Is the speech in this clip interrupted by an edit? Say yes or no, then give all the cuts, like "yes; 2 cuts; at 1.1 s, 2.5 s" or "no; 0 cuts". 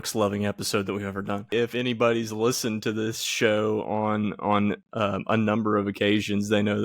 yes; 1 cut; at 1.5 s